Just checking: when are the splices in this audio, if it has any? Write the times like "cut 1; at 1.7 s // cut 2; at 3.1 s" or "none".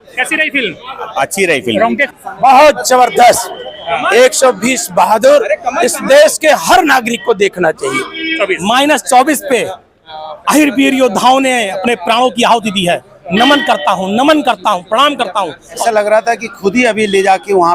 cut 1; at 2.1 s // cut 2; at 8.3 s // cut 3; at 15.8 s